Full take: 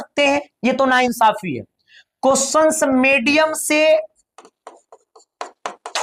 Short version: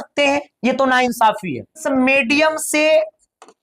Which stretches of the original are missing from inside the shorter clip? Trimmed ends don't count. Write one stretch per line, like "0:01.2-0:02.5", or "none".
0:01.8-0:02.8